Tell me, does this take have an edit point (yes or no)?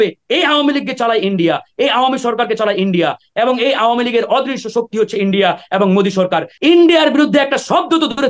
yes